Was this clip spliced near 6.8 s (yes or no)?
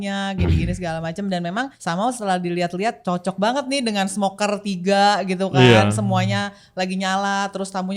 no